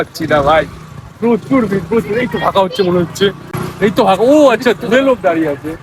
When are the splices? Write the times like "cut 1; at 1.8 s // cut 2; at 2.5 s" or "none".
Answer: none